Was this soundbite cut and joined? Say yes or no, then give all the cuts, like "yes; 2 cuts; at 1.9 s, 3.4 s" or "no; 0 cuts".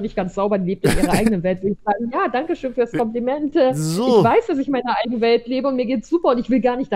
no; 0 cuts